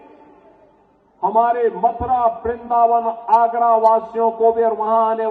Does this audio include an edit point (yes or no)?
no